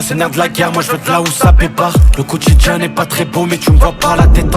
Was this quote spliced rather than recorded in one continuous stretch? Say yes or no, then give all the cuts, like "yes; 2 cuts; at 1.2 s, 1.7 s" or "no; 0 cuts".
no; 0 cuts